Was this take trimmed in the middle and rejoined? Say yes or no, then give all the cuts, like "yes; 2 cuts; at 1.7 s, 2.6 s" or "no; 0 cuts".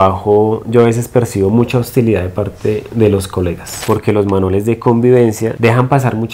yes; 1 cut; at 3.7 s